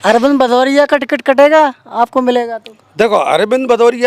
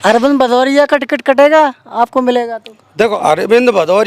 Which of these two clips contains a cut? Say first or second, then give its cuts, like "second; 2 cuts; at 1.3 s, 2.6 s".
second; 1 cut; at 3.1 s